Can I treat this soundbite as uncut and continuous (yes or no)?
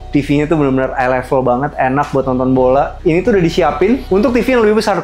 no